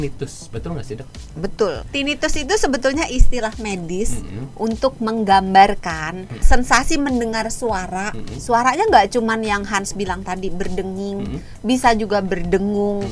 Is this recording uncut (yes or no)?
no